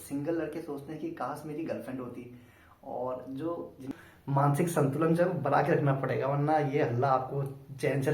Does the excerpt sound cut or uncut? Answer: cut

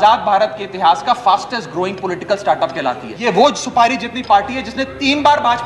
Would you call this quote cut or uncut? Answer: cut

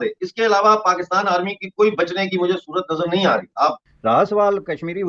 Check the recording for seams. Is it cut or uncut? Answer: cut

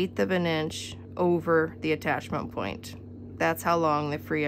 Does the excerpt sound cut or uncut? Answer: uncut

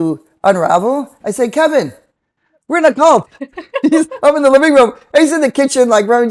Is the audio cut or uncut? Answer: uncut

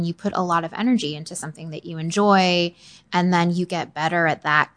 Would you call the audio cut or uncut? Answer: uncut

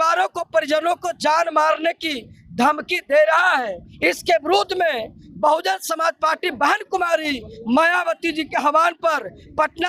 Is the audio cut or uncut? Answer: uncut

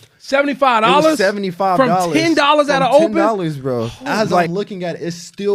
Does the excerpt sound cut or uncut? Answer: cut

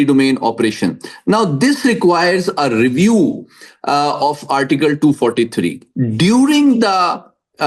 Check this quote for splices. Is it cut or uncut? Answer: cut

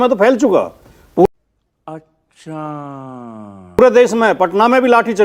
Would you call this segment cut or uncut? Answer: uncut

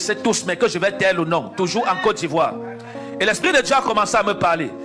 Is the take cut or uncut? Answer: uncut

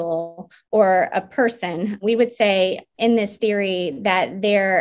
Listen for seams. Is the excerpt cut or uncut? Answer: cut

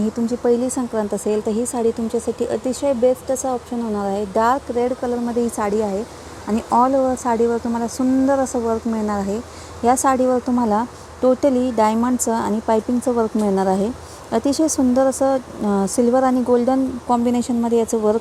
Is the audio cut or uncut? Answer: uncut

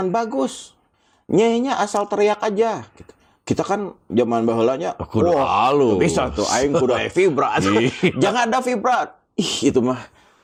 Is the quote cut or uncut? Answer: uncut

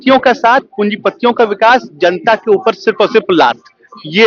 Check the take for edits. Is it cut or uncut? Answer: uncut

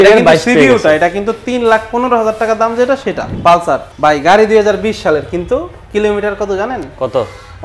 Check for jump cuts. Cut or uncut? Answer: cut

